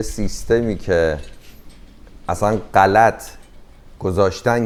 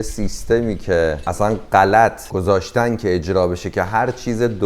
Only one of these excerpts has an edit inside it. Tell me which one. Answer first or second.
second